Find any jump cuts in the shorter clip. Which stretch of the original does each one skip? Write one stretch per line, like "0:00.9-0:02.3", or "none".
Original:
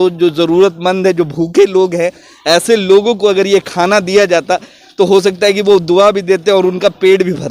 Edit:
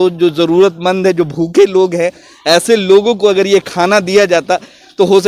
none